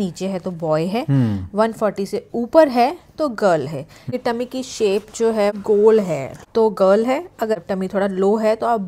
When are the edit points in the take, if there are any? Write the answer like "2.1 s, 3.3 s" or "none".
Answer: 4.1 s, 5.5 s, 6.3 s, 7.5 s